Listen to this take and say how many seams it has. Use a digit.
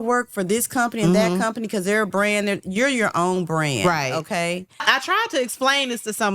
1